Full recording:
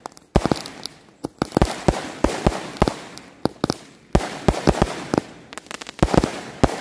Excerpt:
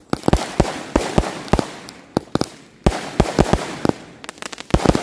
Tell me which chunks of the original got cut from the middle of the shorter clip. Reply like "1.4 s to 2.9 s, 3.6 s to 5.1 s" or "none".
none